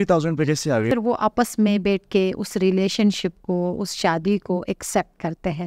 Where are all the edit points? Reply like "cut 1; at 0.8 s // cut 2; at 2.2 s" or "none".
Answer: cut 1; at 0.9 s